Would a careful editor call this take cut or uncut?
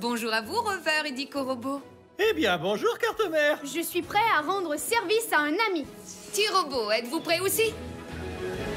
cut